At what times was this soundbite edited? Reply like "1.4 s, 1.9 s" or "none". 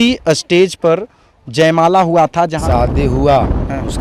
2.6 s